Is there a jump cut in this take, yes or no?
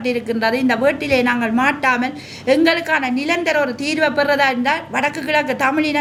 no